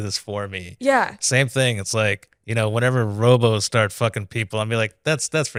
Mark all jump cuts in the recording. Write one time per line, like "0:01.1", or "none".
none